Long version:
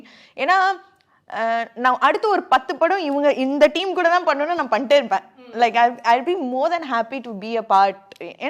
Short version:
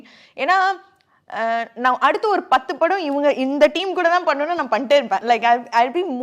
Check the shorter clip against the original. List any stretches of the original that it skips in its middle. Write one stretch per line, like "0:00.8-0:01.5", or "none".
0:05.2-0:05.5